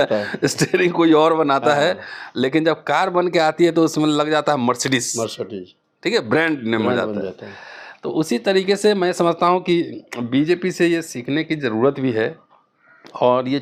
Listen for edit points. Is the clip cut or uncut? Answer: uncut